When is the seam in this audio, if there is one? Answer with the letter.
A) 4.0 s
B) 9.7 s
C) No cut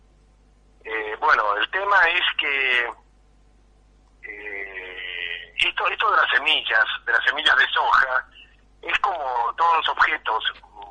C